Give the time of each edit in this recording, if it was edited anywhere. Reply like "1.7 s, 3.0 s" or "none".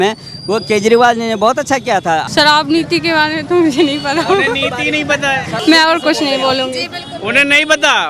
2.2 s, 5.5 s